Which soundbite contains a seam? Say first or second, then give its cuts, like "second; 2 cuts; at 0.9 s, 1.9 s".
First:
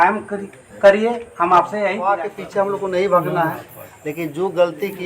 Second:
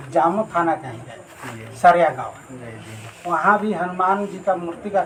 first; 1 cut; at 2.1 s